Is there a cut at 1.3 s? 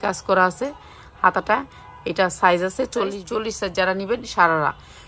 no; 1 cut; at 3.2 s

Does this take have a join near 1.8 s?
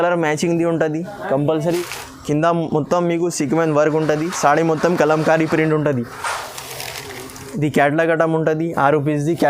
yes; 1 cut; at 1.8 s

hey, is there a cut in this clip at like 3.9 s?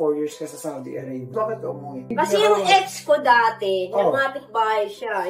no; 1 cut; at 1.3 s

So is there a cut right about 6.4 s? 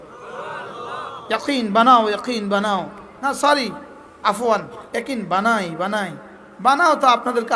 no; 1 cut; at 3.0 s

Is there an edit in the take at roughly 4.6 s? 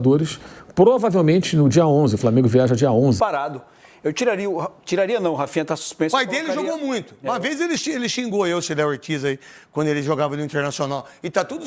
no; 1 cut; at 3.2 s

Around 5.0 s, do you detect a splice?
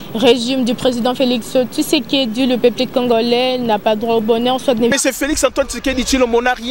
yes; 1 cut; at 5.0 s

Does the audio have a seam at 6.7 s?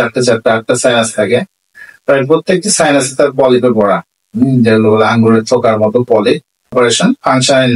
yes; 1 cut; at 6.7 s

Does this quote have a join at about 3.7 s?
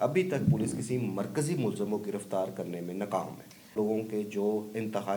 yes; 1 cut; at 3.7 s

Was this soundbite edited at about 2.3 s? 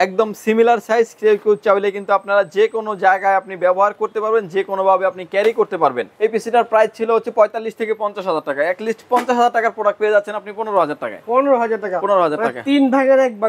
no; 1 cut; at 6.1 s

